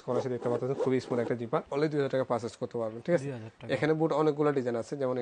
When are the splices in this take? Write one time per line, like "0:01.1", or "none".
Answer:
none

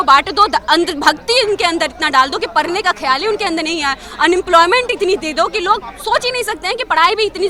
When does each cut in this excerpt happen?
none

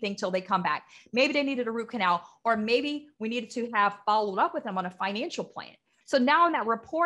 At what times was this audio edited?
0:05.9

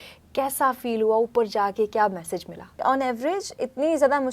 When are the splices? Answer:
0:02.8

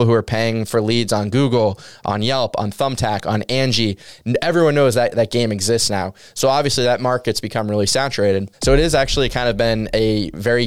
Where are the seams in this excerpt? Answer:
0:04.1
0:08.6

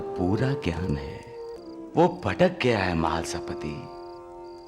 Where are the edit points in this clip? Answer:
0:01.5

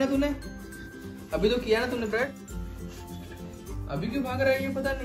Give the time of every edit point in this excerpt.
none

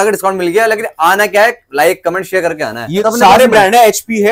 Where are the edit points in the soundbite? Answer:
0:03.0

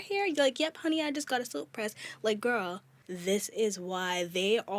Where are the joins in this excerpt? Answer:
0:02.9

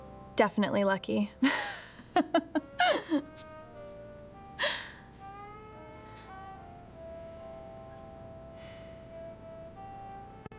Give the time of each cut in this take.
none

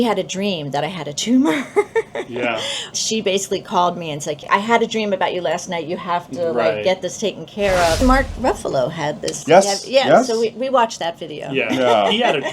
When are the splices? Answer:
0:02.9
0:04.4
0:08.0

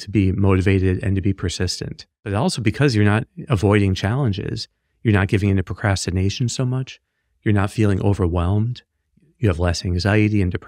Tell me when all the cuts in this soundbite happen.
0:02.3

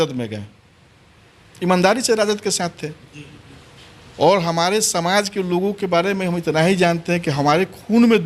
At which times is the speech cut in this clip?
none

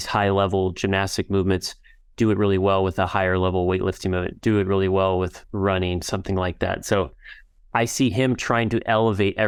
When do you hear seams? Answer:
none

